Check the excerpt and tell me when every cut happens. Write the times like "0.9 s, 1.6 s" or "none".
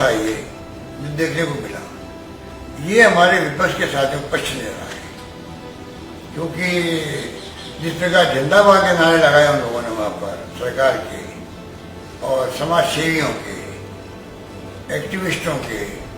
2.2 s